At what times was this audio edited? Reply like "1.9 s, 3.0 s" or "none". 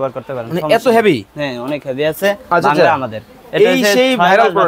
3.4 s